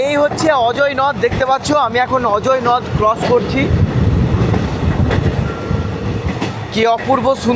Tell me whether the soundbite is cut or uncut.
uncut